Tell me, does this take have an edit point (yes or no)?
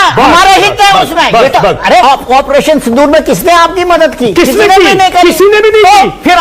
yes